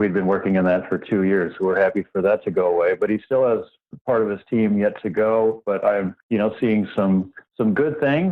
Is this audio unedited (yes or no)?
yes